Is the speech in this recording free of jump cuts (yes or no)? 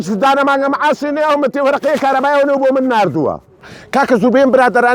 no